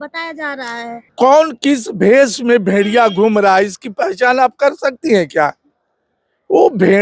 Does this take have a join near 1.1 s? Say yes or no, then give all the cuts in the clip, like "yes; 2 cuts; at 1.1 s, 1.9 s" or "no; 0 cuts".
yes; 1 cut; at 1.1 s